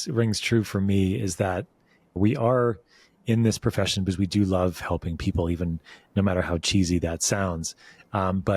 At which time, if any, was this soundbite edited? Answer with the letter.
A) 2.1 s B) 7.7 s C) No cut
A